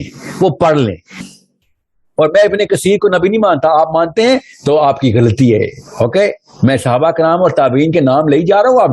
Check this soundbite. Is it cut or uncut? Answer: cut